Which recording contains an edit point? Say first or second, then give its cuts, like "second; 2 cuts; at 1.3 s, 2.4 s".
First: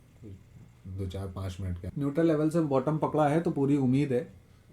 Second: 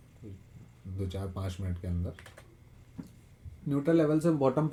first; 1 cut; at 1.9 s